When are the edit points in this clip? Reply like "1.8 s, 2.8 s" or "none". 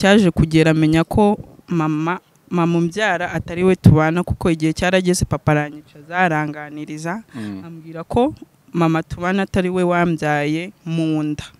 none